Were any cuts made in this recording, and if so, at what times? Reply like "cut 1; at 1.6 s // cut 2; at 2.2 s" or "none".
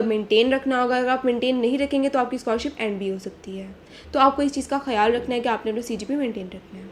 none